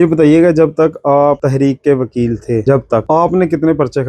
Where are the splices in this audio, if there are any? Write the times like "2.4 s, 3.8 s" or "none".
1.4 s, 2.8 s

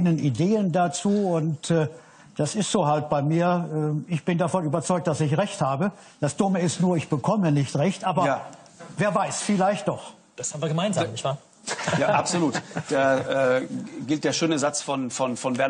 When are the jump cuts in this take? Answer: 11.9 s

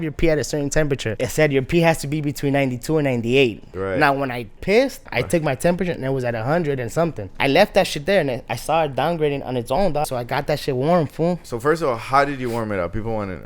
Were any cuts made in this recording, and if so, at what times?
1.1 s, 3.7 s, 5.1 s, 7.3 s, 10.1 s, 11.4 s

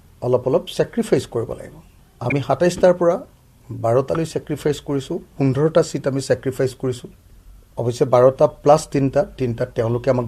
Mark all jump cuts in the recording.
none

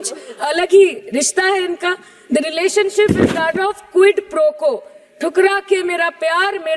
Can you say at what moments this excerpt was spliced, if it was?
none

